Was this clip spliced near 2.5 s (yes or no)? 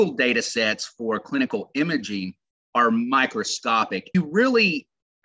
no